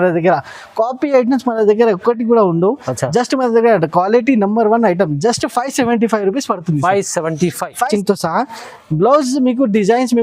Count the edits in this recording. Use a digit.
1